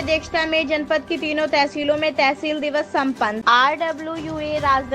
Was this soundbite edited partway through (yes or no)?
yes